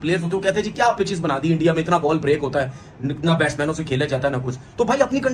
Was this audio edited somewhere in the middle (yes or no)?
no